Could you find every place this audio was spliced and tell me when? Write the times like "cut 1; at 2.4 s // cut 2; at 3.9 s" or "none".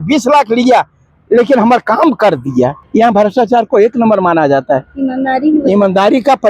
none